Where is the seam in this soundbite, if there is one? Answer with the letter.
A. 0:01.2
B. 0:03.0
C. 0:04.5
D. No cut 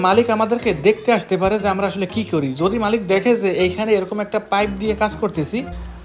D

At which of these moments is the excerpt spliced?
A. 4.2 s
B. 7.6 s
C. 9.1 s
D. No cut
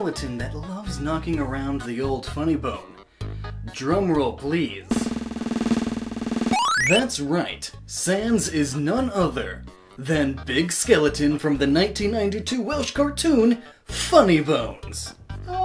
C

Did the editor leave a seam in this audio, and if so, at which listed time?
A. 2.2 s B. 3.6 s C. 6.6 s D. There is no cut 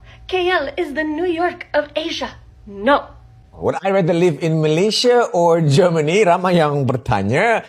B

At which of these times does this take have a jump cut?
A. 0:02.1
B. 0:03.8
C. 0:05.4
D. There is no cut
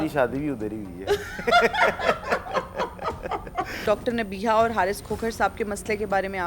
B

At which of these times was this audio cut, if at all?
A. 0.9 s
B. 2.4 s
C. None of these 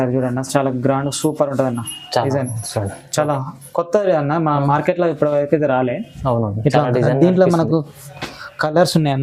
C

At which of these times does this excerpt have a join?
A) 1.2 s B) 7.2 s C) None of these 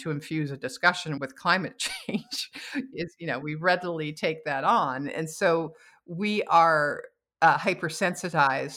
A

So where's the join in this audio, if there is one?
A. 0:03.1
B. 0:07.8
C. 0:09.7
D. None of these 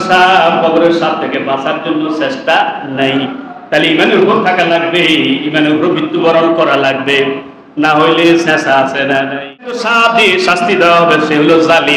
C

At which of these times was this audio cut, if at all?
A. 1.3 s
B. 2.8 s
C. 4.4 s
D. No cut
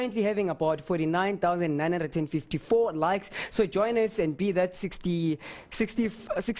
C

